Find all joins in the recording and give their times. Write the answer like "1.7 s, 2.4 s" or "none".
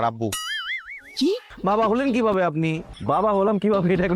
1.5 s, 2.8 s